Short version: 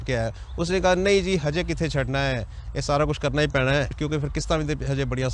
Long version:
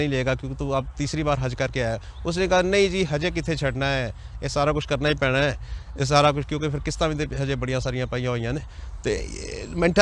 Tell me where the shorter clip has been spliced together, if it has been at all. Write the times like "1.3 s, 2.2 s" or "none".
4.0 s